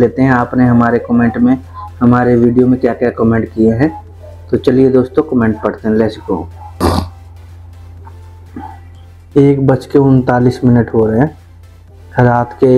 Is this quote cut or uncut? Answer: cut